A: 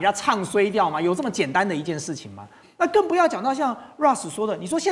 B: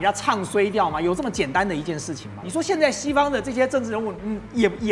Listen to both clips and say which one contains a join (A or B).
B